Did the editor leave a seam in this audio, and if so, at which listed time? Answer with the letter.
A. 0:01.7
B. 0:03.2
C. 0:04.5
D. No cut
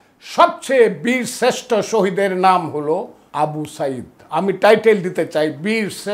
B